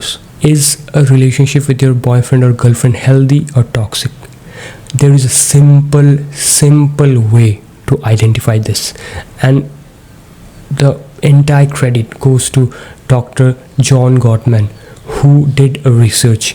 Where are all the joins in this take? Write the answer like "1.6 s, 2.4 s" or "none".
none